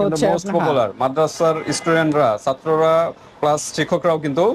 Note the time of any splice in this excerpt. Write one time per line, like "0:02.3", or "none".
none